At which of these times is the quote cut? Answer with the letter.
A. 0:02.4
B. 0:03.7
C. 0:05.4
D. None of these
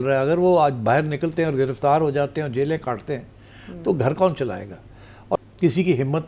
C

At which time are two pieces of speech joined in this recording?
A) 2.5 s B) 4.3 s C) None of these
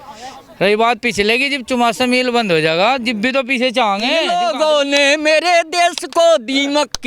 B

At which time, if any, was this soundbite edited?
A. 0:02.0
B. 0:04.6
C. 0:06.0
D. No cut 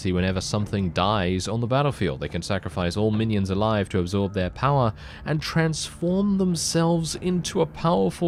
D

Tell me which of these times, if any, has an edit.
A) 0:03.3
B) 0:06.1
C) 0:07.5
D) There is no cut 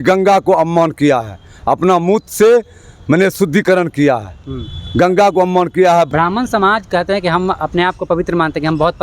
B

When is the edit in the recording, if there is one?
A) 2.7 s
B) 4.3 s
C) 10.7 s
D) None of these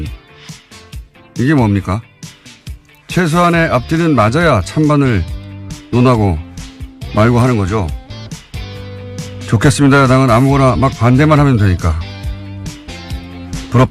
B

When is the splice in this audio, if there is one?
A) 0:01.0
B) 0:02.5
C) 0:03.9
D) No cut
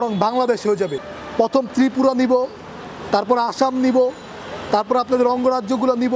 A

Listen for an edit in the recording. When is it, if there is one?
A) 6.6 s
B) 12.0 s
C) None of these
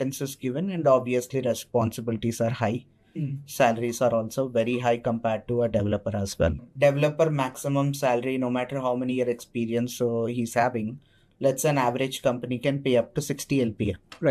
A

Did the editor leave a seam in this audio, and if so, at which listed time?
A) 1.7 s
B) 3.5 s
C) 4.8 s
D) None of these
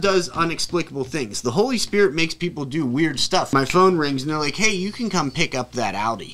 B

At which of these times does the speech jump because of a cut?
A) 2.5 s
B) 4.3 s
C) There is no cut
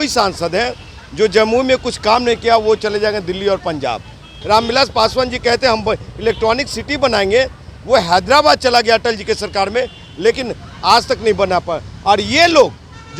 B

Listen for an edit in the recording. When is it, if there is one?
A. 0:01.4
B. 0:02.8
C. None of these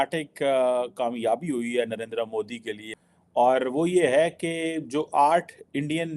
B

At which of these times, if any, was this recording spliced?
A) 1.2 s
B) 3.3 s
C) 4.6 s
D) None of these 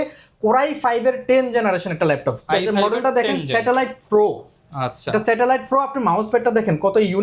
D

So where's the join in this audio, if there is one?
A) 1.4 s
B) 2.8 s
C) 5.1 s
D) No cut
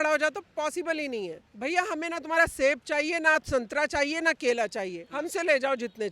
A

